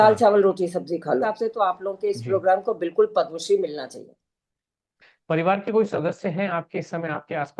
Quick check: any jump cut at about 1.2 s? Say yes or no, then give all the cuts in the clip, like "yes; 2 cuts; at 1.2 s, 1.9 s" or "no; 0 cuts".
yes; 2 cuts; at 1.2 s, 4.9 s